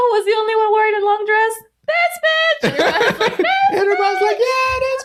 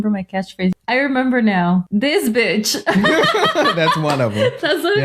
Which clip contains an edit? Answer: second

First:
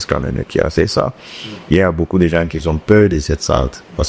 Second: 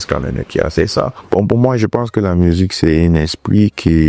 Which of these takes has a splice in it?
second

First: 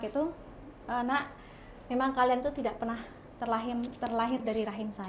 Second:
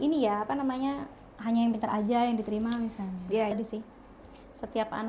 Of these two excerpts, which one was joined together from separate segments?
second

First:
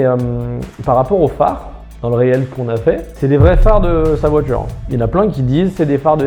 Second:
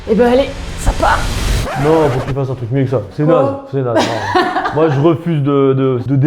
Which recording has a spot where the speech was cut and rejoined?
second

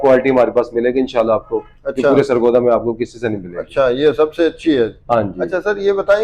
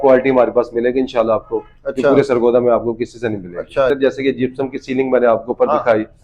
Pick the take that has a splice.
second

